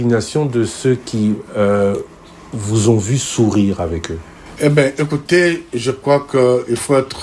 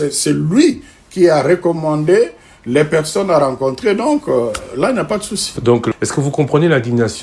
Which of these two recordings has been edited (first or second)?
second